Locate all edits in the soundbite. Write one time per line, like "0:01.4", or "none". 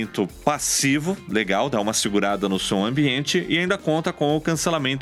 none